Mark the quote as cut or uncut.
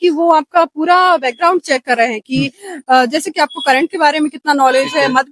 uncut